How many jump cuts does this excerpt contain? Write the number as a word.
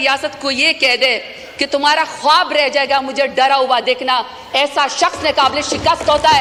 zero